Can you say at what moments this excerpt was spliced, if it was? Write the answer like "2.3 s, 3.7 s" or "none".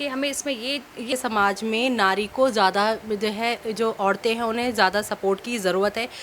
1.1 s